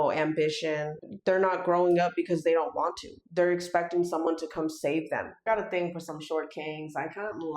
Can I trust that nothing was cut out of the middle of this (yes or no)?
no